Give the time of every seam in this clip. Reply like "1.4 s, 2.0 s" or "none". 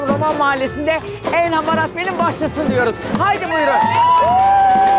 none